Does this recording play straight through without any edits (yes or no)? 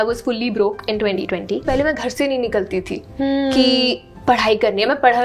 no